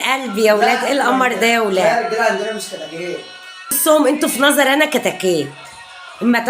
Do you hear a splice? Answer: yes; 1 cut; at 3.7 s

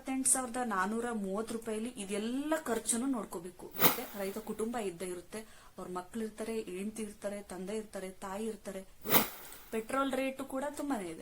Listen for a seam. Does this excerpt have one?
yes; 2 cuts; at 4.0 s, 9.2 s

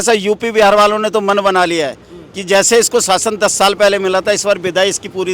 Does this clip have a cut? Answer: no; 0 cuts

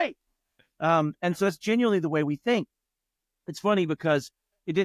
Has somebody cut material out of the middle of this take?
no; 0 cuts

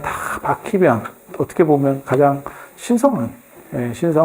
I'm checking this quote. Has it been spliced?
yes; 1 cut; at 1.3 s

